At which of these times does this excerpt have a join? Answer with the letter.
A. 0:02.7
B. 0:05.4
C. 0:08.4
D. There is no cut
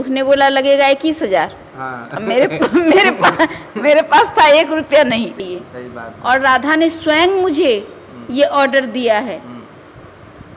B